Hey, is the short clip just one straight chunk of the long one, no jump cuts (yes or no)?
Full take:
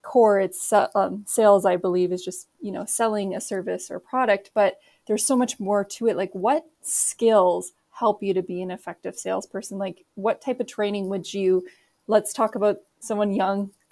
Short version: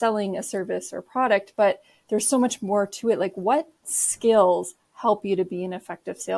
yes